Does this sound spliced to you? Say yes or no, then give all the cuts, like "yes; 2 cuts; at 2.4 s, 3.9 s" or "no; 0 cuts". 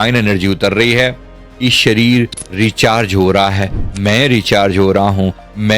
yes; 1 cut; at 1.4 s